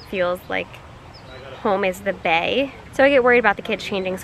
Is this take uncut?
no; 1 cut; at 2.8 s

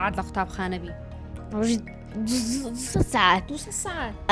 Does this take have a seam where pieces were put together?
no; 0 cuts

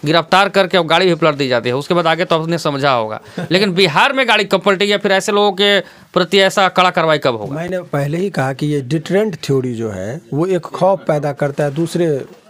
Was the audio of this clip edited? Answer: no; 0 cuts

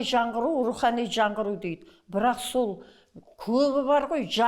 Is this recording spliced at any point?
no; 0 cuts

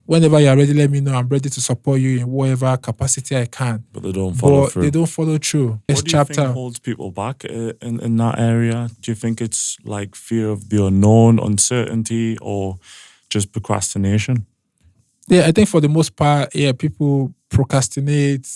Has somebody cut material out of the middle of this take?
yes; 1 cut; at 5.8 s

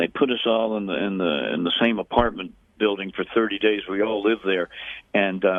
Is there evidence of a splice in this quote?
no; 0 cuts

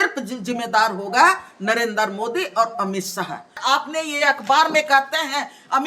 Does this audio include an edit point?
yes; 1 cut; at 3.6 s

